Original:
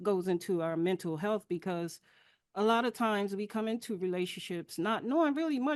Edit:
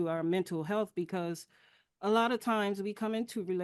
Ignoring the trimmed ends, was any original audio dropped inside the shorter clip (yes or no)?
no